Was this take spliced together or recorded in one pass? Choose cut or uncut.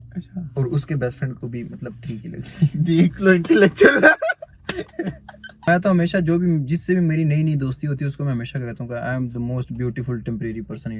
cut